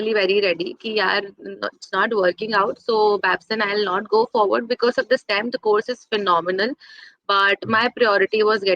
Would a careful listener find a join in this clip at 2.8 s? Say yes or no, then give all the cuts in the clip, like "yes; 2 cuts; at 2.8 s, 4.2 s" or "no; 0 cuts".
no; 0 cuts